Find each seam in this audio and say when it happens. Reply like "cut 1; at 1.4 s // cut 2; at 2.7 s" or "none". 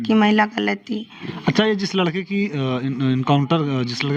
cut 1; at 1.3 s